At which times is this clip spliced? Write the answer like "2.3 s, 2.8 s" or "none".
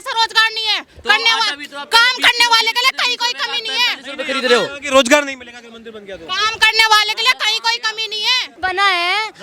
8.5 s